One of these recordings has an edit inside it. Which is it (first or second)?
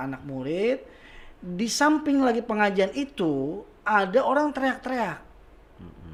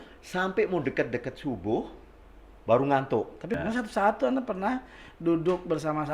second